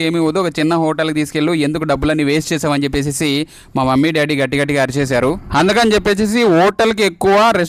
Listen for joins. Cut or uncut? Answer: uncut